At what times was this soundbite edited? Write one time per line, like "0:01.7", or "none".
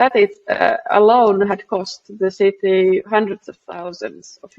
none